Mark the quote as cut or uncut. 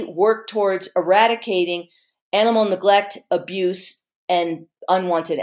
uncut